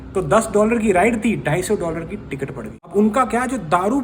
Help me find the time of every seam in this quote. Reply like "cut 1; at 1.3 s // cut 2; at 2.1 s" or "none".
cut 1; at 2.9 s